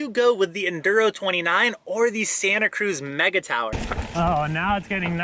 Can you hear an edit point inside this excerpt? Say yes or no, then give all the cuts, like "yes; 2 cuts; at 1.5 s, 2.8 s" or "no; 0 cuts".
yes; 1 cut; at 3.7 s